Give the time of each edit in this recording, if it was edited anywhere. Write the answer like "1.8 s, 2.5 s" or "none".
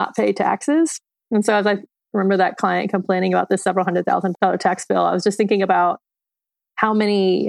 4.3 s